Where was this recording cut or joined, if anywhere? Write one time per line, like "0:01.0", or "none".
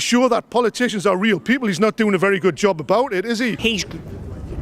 0:03.6